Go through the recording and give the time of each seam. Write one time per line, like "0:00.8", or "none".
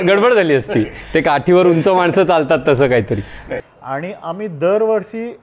0:03.7